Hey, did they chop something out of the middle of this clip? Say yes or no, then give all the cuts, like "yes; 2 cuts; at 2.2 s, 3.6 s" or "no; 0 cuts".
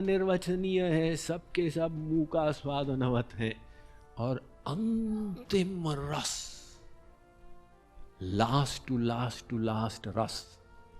no; 0 cuts